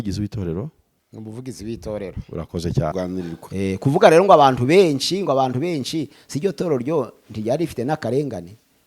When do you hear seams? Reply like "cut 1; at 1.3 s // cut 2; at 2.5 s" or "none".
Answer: cut 1; at 2.9 s